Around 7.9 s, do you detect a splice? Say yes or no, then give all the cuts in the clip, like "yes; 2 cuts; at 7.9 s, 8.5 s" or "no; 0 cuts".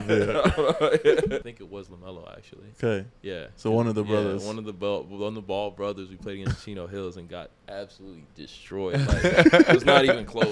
no; 1 cut; at 1.4 s